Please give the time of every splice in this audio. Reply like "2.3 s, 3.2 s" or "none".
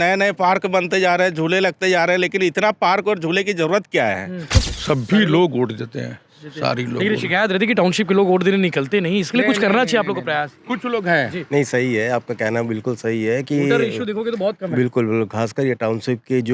4.5 s